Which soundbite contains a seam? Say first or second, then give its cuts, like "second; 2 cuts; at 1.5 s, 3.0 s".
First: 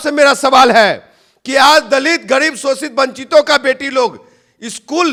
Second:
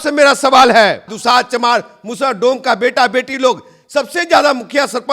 second; 1 cut; at 1.1 s